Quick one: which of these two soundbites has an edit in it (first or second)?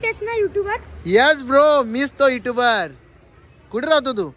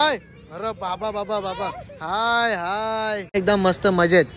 second